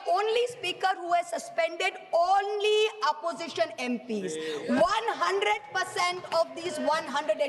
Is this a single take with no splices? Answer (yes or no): yes